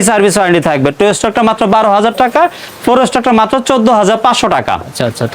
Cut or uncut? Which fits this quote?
uncut